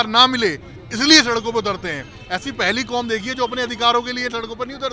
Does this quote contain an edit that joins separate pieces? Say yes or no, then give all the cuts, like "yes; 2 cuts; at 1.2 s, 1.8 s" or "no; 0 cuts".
no; 0 cuts